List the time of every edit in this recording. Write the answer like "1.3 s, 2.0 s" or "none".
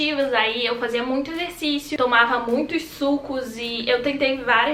1.9 s